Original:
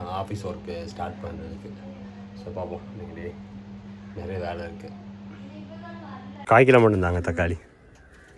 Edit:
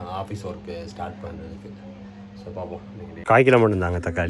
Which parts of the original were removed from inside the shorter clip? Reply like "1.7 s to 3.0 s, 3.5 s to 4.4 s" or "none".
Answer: 3.2 s to 6.4 s